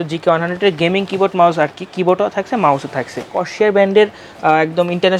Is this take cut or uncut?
cut